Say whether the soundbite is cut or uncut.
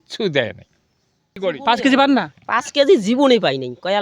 cut